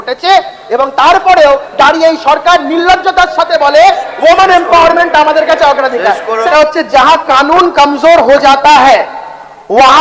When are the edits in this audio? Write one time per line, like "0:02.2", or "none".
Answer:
0:06.5